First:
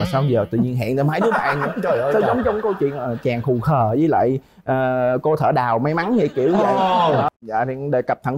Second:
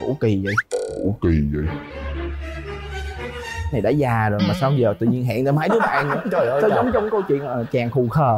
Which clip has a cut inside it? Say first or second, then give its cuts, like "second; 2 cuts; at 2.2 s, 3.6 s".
first; 1 cut; at 7.3 s